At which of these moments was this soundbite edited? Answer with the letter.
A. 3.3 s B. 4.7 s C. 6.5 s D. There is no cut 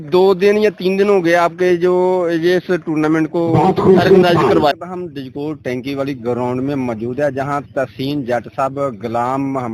B